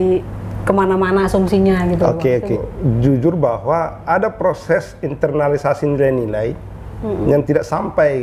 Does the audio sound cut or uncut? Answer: cut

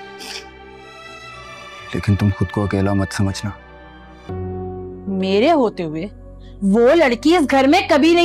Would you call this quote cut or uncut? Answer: cut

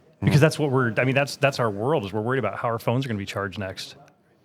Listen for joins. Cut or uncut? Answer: uncut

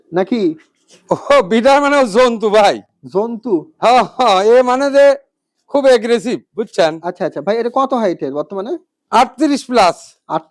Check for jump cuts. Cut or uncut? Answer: uncut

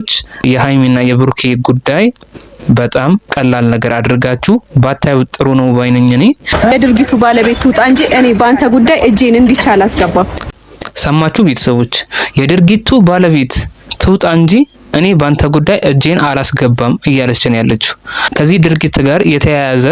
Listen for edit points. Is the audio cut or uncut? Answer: cut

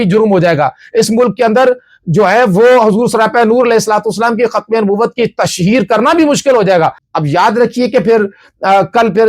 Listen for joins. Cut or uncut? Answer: cut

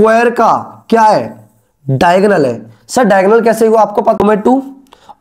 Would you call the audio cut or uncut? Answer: cut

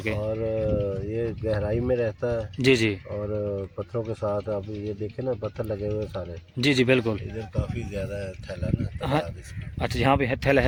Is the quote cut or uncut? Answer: uncut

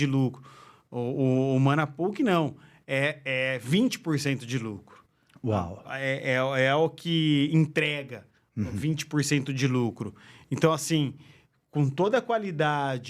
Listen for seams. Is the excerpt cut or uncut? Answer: uncut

